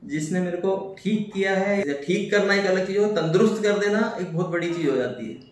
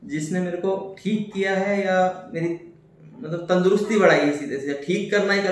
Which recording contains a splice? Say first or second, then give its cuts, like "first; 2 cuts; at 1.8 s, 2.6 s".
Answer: first; 1 cut; at 1.8 s